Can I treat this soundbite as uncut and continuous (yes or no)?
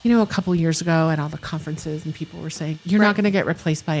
no